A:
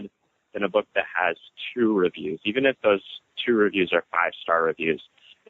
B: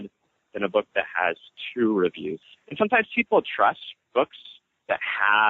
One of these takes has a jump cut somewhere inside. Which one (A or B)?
B